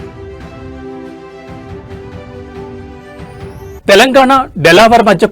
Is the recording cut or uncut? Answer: cut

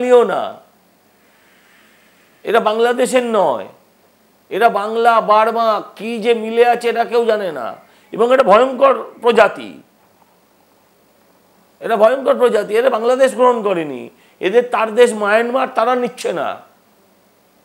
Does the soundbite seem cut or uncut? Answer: uncut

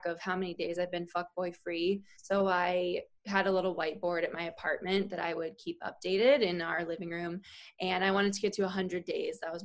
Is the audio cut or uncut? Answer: uncut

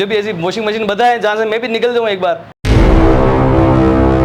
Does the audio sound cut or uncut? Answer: cut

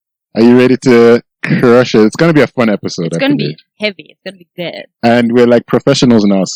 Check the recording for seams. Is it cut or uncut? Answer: uncut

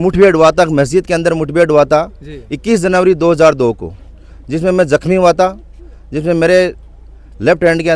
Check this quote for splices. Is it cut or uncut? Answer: uncut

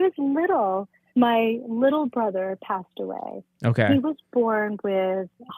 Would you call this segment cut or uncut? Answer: uncut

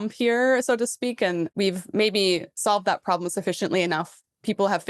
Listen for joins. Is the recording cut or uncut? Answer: cut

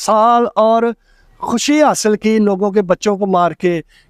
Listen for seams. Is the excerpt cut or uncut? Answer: uncut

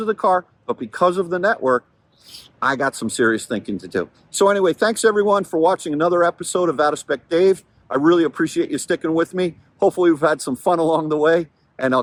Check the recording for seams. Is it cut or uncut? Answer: uncut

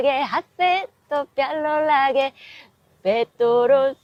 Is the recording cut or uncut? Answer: uncut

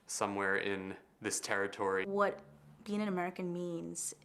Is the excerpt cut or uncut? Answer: cut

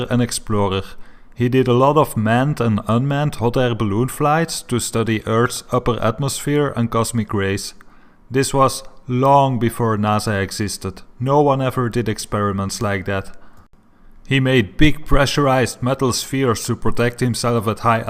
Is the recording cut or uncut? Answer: uncut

